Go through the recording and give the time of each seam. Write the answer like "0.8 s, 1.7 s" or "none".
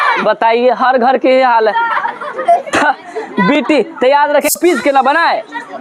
4.5 s